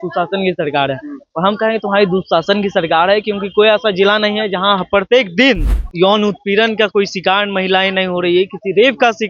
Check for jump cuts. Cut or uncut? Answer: cut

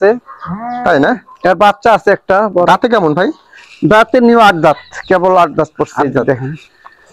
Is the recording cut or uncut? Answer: uncut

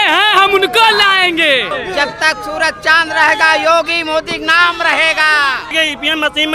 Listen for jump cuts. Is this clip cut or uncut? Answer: cut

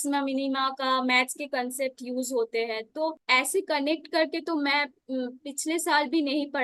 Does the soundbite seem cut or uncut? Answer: uncut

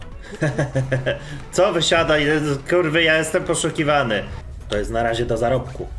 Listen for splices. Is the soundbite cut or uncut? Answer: cut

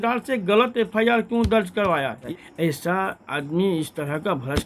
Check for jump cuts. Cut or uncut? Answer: cut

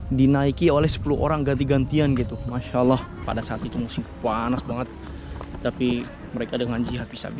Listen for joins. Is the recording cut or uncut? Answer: cut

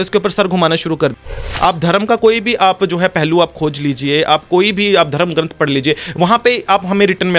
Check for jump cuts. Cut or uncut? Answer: cut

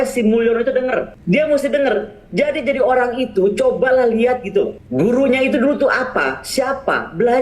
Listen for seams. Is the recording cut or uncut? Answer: cut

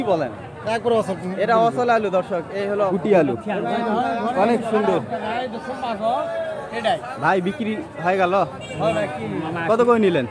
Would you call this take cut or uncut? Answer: cut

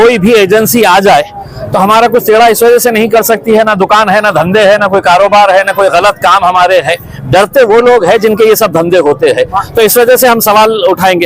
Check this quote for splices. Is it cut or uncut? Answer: uncut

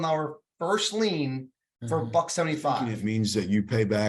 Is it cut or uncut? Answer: cut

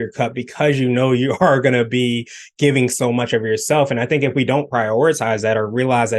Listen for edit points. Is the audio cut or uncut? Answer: uncut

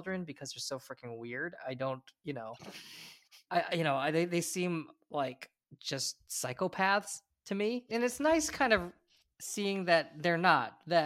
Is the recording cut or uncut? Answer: uncut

